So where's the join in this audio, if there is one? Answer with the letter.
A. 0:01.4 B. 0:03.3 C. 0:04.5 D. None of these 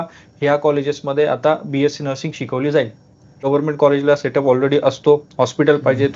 B